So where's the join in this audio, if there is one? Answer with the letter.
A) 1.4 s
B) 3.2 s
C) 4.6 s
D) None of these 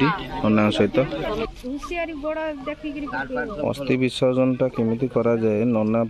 A